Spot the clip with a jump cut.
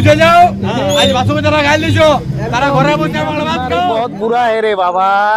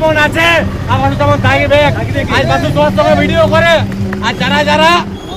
first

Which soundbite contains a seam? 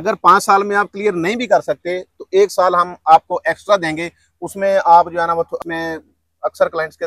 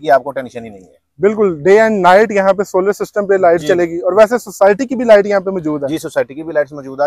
first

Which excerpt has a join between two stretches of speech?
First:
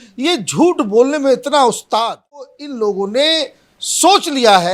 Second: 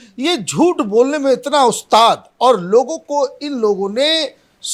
first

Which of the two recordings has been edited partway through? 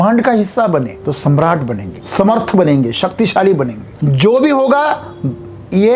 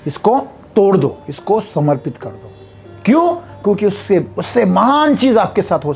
first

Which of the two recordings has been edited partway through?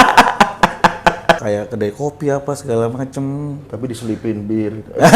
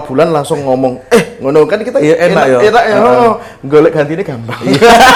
first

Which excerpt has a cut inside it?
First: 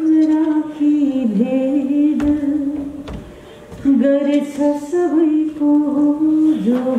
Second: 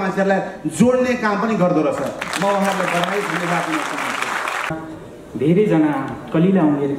second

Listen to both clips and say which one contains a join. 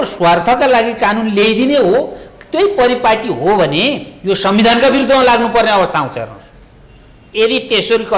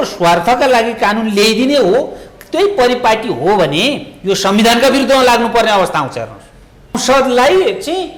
second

